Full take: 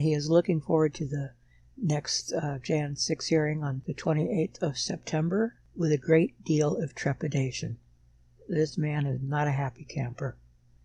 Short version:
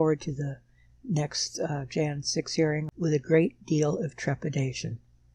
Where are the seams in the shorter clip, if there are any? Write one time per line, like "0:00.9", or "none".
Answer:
0:02.9